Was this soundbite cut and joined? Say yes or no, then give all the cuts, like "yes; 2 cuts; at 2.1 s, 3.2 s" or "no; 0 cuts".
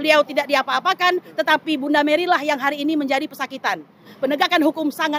yes; 1 cut; at 4.0 s